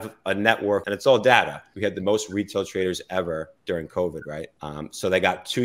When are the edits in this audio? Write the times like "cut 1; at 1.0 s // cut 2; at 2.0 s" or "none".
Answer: cut 1; at 0.8 s // cut 2; at 1.6 s // cut 3; at 4.6 s